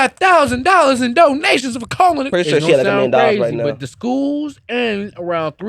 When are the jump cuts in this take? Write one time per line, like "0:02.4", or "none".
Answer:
0:02.3